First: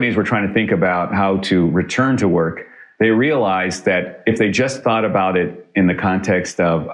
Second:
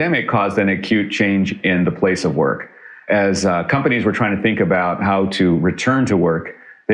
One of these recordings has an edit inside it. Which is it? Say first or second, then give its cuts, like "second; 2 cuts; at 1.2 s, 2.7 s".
first; 1 cut; at 4.1 s